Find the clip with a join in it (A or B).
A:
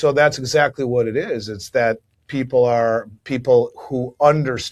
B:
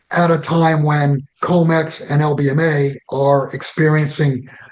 B